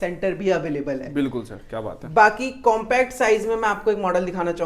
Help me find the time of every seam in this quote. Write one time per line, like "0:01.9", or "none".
none